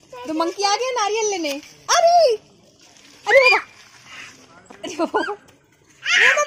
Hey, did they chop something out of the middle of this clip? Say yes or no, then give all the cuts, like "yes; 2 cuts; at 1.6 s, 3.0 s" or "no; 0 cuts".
no; 0 cuts